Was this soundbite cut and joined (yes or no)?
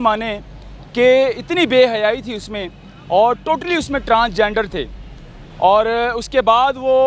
no